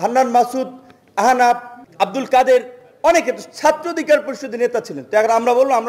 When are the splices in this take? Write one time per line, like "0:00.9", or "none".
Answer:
0:01.8